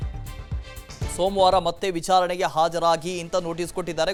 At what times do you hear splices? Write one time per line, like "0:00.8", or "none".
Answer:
none